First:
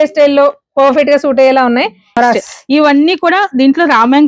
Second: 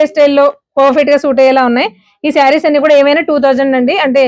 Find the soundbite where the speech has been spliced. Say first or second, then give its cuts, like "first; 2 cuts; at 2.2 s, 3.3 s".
first; 1 cut; at 2.2 s